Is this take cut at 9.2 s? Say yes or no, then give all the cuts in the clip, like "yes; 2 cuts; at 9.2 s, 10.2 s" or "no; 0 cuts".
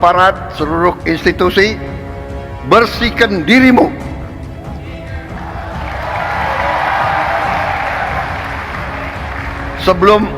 no; 1 cut; at 1.0 s